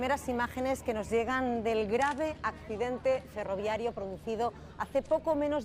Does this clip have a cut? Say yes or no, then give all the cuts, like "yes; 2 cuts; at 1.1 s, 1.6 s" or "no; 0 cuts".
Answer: no; 0 cuts